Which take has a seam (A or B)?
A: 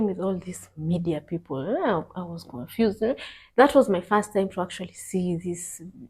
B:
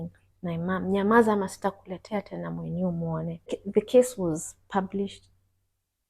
B